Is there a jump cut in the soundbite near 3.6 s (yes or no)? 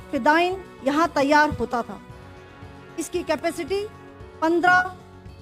no